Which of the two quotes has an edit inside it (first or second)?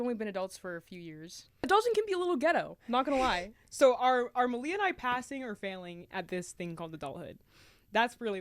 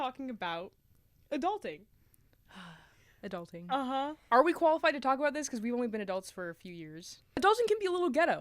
second